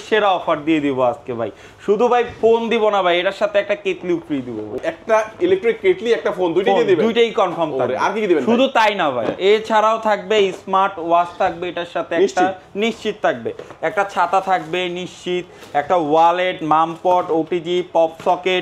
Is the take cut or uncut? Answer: cut